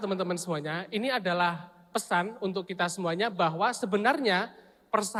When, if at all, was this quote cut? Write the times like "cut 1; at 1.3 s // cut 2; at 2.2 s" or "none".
none